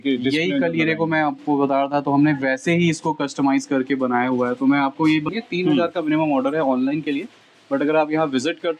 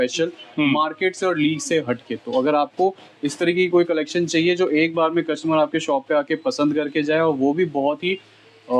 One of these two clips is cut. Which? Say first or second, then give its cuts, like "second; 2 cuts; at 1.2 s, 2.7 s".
first; 1 cut; at 5.3 s